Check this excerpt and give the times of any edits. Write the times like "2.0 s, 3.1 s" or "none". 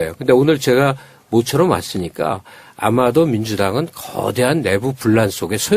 1.0 s